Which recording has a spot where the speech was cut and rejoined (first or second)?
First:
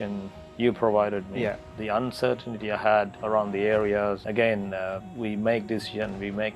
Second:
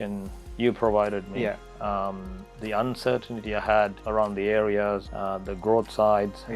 first